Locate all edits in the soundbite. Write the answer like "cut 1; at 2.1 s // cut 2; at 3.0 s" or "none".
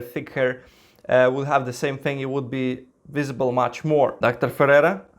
cut 1; at 4.2 s